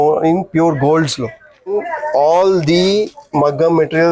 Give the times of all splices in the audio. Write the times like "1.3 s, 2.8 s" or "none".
1.7 s